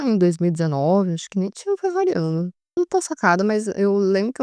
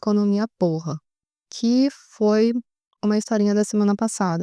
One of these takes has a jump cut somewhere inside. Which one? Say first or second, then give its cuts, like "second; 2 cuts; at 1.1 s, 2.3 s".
first; 1 cut; at 2.7 s